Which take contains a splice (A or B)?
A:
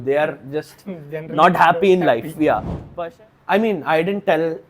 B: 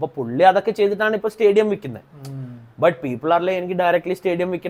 A